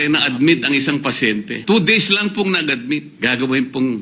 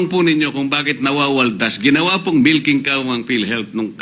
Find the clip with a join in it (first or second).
first